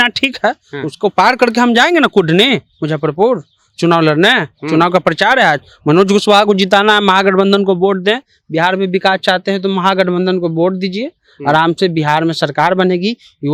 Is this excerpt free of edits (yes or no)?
yes